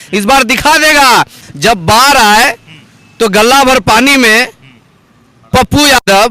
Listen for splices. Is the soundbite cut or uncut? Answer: cut